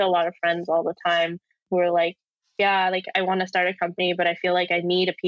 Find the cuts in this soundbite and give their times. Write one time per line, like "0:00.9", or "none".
0:01.6